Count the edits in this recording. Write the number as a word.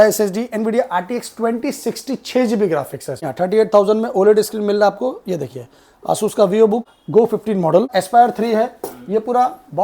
three